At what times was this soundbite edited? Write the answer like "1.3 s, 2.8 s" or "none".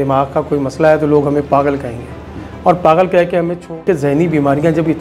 3.8 s